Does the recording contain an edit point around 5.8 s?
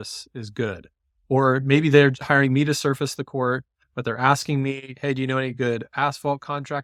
no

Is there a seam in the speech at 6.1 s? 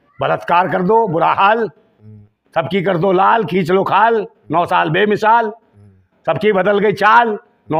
no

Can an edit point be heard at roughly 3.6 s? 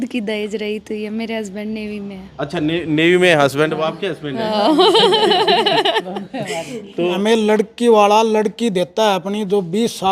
no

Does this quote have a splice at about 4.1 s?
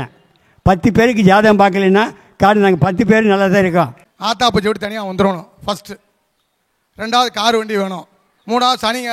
yes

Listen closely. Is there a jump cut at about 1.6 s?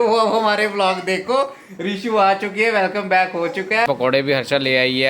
no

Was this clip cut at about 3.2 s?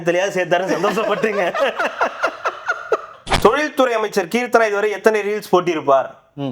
yes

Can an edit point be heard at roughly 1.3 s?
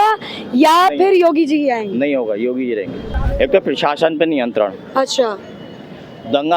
no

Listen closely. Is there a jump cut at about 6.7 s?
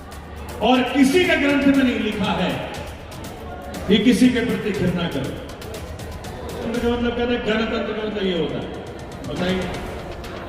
yes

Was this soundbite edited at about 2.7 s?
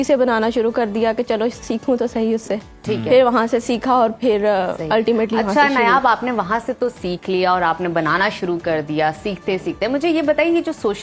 no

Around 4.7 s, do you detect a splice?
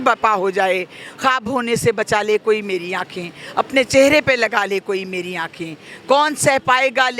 no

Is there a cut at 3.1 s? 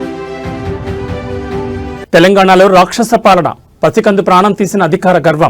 no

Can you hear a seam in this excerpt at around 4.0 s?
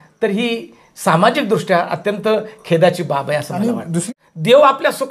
yes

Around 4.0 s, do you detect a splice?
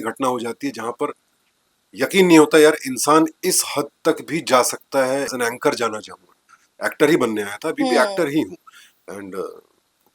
no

